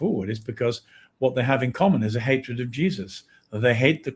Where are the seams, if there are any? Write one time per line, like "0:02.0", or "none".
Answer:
none